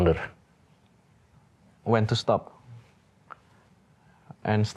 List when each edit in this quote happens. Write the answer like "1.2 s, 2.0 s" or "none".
none